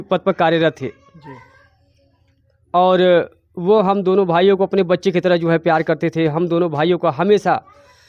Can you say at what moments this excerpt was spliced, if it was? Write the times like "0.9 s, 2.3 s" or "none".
none